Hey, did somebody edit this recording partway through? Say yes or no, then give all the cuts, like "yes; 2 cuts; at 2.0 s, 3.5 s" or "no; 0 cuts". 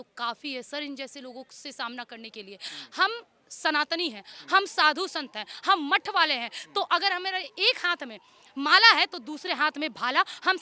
yes; 1 cut; at 2.7 s